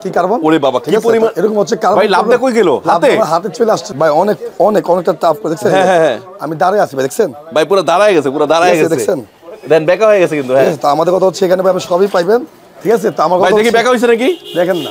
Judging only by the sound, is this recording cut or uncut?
cut